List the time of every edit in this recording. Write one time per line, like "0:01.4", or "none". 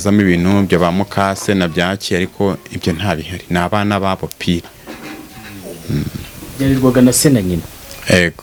none

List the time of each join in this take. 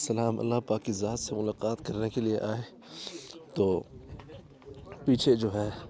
none

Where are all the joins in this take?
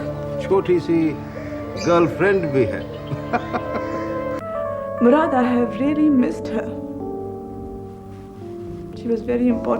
0:04.4

